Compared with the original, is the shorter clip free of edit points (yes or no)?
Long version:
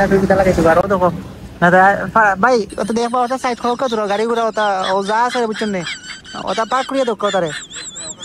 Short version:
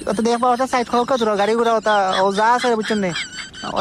yes